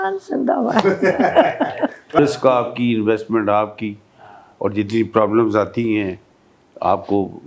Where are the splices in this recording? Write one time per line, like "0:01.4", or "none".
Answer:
0:02.2